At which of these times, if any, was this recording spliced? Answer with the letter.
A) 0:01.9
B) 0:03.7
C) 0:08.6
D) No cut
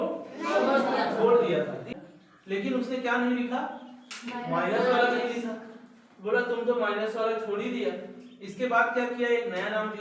A